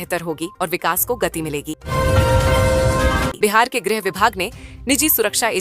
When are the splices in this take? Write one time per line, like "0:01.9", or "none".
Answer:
0:01.8
0:03.3